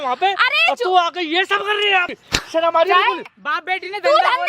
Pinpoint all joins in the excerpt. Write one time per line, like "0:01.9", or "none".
0:02.1
0:03.3